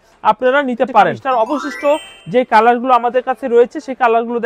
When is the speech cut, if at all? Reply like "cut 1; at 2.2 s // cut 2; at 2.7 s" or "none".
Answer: cut 1; at 1.2 s